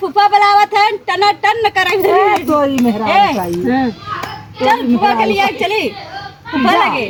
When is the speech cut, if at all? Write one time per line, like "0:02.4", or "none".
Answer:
none

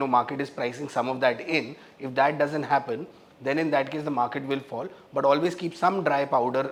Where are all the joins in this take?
none

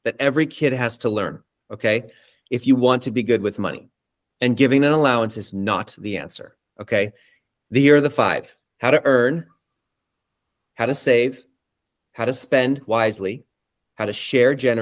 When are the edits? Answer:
none

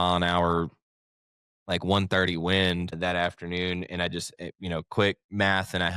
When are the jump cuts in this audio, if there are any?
0:02.9

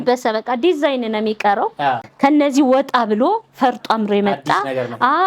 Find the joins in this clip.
0:02.1

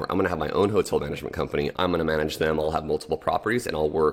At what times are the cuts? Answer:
0:01.7

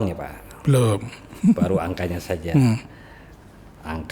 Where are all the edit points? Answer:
none

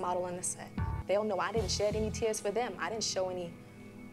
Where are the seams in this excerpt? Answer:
0:00.9

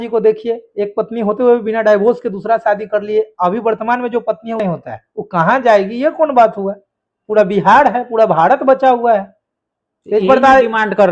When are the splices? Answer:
0:04.6

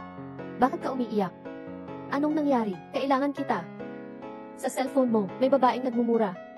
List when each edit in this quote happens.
none

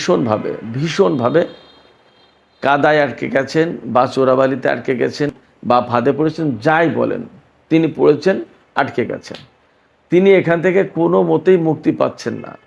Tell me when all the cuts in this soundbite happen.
0:05.3

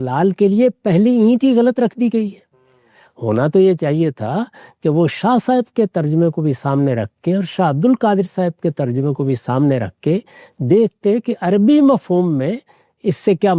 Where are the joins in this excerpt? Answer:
none

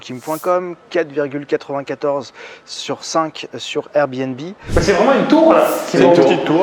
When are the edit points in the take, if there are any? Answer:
0:04.6

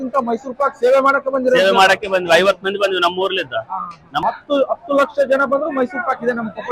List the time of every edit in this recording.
0:04.2

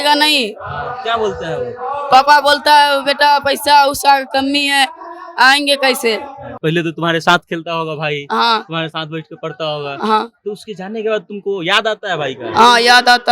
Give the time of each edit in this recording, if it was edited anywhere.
0:06.4

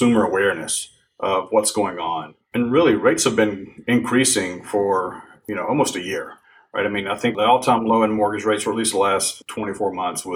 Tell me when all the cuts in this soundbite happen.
0:02.4
0:07.4
0:09.4

